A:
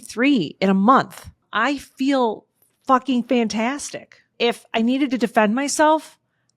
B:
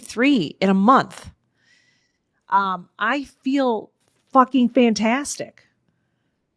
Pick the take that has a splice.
A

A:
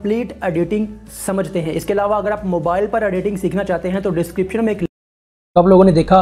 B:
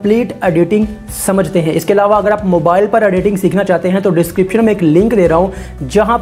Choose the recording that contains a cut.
B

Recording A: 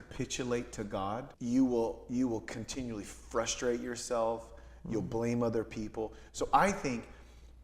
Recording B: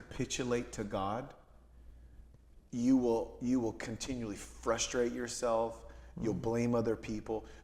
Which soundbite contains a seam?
A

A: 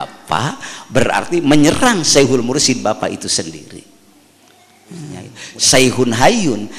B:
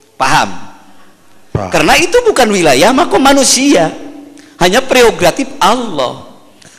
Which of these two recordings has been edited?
A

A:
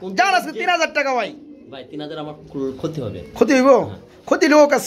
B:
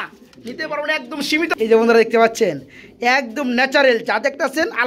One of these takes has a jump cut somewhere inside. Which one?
B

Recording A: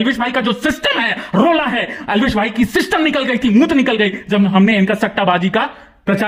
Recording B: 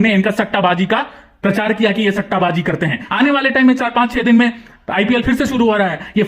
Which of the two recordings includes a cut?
B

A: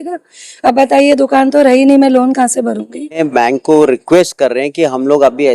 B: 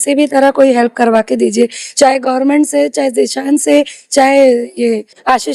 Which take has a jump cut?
A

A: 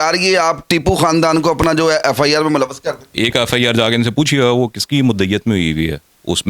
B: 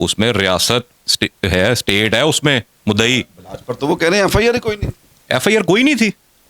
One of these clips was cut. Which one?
A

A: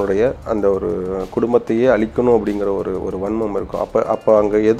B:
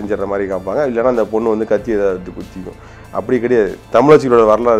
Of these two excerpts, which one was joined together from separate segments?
B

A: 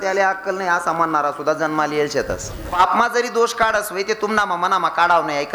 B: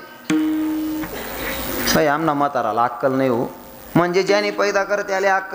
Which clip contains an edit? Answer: A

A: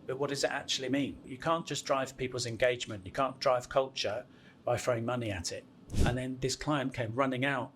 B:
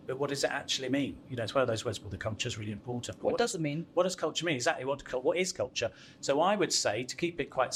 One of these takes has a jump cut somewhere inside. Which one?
A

